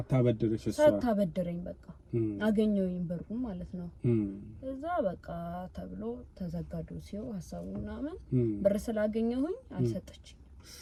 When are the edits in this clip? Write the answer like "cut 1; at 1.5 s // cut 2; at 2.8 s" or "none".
none

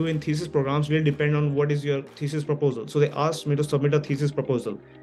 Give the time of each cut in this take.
none

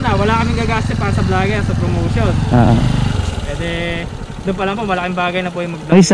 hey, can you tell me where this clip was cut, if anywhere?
none

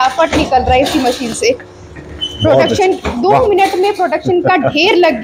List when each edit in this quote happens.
none

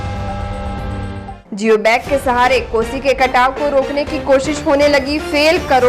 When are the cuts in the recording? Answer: cut 1; at 1.4 s

